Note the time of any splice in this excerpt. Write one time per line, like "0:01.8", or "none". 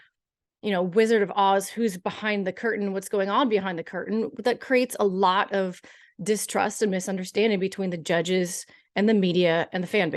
none